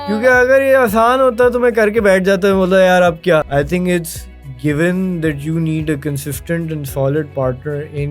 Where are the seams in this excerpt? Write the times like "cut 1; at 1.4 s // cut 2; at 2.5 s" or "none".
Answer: cut 1; at 3.5 s

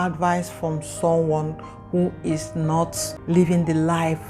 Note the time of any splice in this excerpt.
cut 1; at 3.1 s

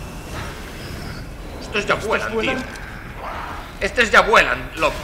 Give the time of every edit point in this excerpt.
none

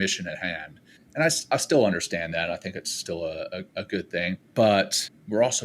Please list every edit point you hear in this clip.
cut 1; at 4.4 s

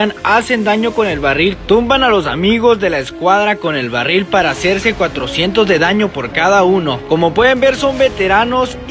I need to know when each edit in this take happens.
cut 1; at 7.0 s

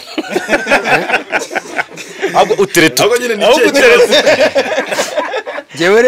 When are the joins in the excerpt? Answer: none

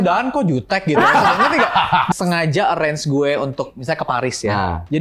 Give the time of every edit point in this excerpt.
cut 1; at 2.1 s

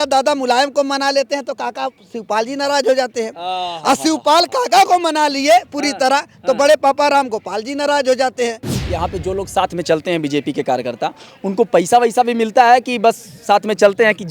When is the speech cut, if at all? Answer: cut 1; at 8.7 s

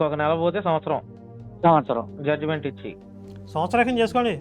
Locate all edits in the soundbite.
cut 1; at 3.1 s

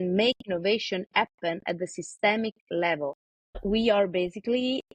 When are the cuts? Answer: cut 1; at 3.6 s

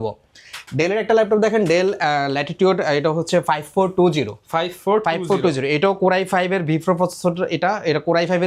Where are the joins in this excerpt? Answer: none

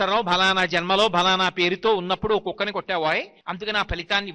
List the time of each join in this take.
cut 1; at 3.4 s

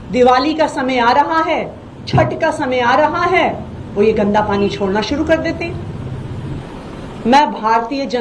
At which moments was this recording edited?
cut 1; at 6.6 s

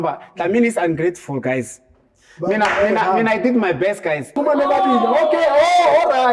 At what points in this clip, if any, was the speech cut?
cut 1; at 4.4 s

